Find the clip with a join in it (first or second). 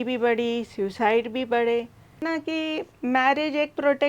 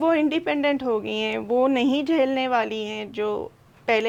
first